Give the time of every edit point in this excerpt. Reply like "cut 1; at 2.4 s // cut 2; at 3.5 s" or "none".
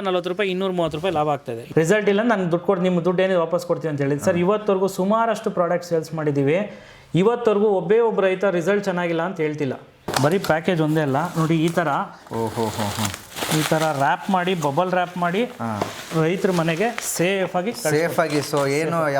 cut 1; at 1.6 s // cut 2; at 10.1 s